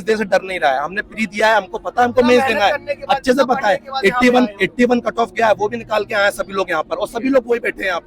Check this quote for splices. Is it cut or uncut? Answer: uncut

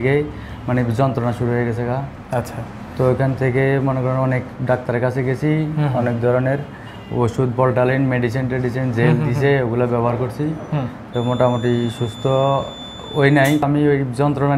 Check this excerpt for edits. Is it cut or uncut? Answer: cut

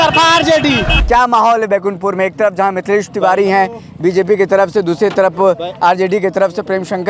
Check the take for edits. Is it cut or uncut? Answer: cut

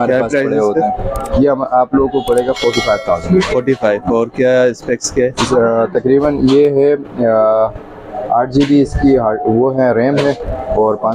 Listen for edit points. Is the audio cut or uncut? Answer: uncut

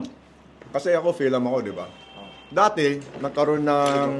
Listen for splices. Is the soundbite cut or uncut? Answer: uncut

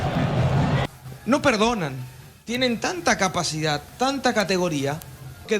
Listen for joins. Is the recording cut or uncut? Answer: uncut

